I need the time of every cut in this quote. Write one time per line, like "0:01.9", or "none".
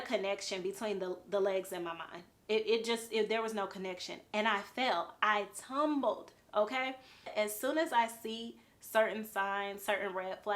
0:07.3